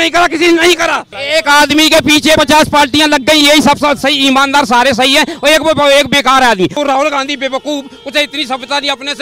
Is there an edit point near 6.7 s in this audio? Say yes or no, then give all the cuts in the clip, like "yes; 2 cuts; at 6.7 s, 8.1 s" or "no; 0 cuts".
yes; 2 cuts; at 1.1 s, 6.7 s